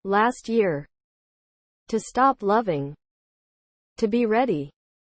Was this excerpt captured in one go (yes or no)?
yes